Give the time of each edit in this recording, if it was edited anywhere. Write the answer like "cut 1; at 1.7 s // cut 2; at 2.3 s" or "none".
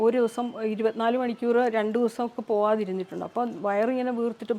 none